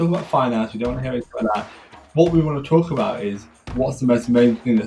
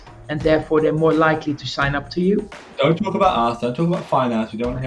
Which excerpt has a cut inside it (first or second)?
second